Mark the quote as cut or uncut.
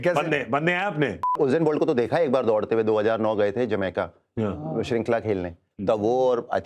cut